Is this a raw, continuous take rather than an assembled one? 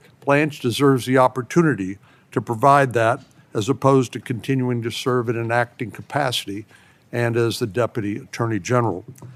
yes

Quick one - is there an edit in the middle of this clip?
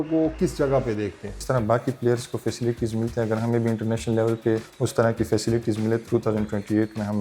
yes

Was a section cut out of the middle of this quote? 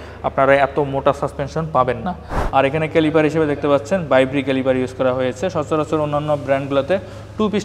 yes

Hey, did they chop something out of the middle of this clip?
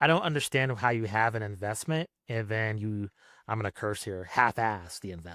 no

